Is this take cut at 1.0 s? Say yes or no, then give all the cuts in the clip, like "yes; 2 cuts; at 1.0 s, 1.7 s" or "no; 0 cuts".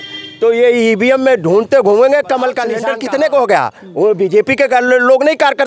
no; 1 cut; at 2.8 s